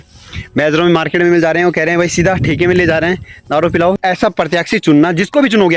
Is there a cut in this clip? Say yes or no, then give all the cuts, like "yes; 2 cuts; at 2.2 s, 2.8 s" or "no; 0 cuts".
yes; 1 cut; at 3.9 s